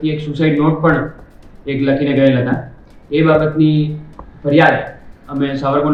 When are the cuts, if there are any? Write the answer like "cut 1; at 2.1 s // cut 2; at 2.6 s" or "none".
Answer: none